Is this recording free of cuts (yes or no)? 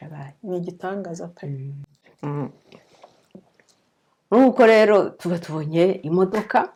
yes